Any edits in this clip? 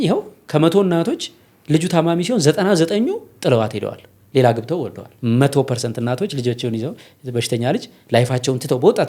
yes; 1 cut; at 5.1 s

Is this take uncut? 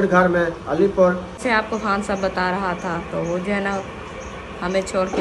no; 1 cut; at 1.4 s

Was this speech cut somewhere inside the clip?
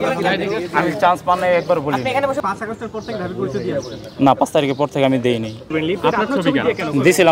yes; 2 cuts; at 2.4 s, 5.7 s

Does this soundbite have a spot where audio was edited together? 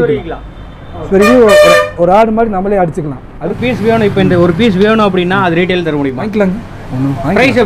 yes; 2 cuts; at 3.6 s, 6.2 s

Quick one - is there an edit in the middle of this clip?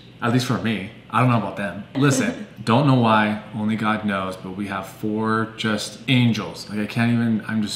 no; 0 cuts

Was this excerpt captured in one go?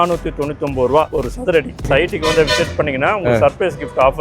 no; 1 cut; at 1.8 s

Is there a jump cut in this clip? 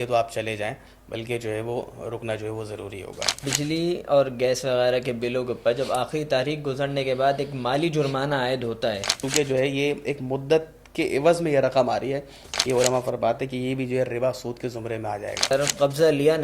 yes; 4 cuts; at 3.4 s, 9.2 s, 12.5 s, 15.5 s

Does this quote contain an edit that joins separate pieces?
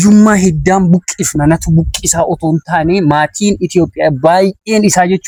no; 0 cuts

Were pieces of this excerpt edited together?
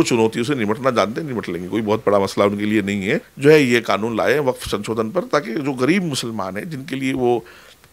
yes; 1 cut; at 3.3 s

